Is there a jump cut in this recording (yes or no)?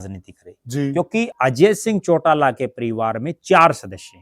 yes